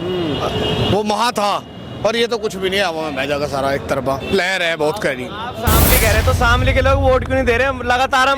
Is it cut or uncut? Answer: cut